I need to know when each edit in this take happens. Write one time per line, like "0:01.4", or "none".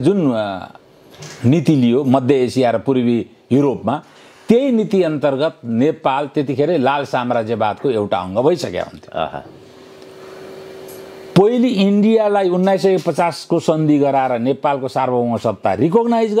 none